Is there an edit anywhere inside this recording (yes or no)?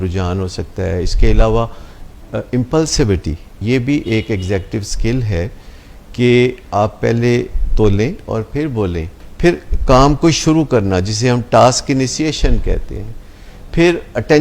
yes